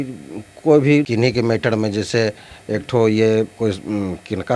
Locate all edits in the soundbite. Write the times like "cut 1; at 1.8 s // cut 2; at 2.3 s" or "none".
cut 1; at 1.1 s